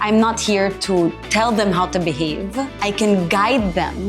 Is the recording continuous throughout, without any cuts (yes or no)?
no